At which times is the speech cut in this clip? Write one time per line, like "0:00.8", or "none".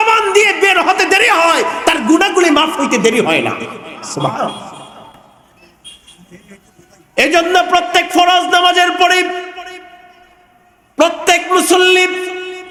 none